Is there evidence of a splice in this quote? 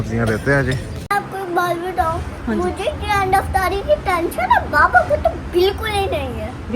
yes; 1 cut; at 1.1 s

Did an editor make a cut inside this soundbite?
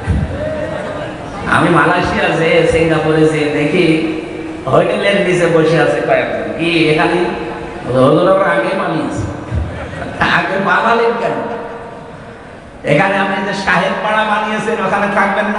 yes; 1 cut; at 1.1 s

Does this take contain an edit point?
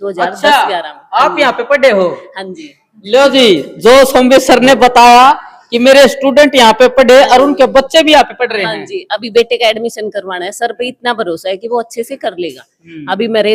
no; 0 cuts

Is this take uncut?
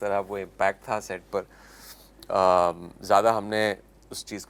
yes; 0 cuts

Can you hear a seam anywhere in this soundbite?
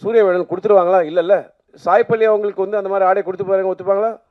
yes; 1 cut; at 1.7 s

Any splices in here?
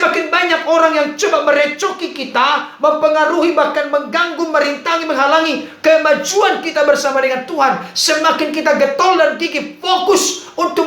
no; 0 cuts

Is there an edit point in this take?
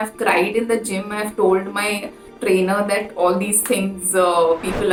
no; 0 cuts

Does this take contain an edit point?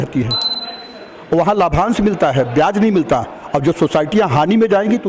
no; 0 cuts

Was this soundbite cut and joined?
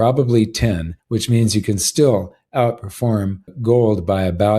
yes; 2 cuts; at 0.9 s, 3.5 s

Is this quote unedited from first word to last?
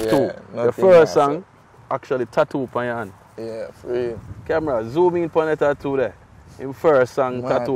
yes; 0 cuts

